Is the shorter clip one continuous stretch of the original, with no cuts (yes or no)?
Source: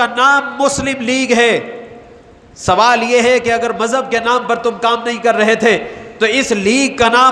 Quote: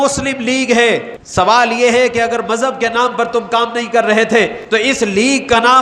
no